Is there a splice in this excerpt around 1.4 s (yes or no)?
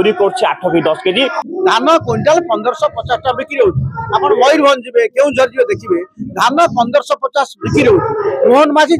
yes